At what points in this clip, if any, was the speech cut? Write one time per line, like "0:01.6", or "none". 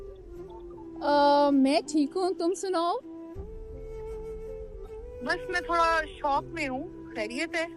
0:03.6
0:05.2